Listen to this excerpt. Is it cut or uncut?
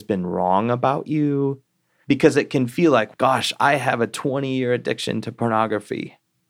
uncut